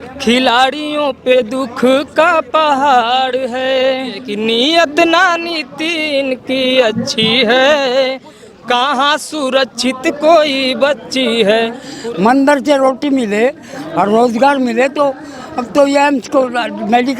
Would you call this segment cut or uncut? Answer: cut